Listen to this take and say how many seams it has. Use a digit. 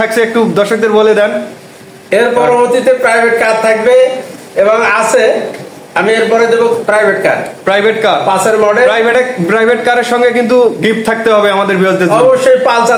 0